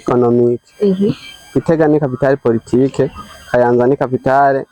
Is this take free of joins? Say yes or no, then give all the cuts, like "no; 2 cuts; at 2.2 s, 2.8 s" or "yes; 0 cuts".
yes; 0 cuts